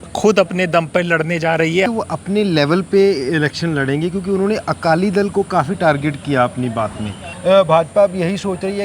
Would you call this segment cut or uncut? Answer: cut